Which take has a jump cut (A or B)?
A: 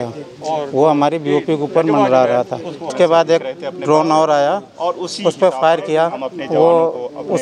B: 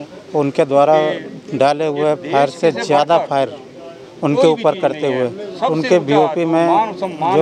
A